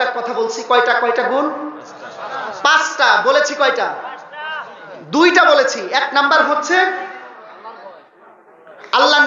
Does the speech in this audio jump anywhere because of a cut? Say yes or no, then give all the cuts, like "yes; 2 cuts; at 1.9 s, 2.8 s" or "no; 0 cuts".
no; 0 cuts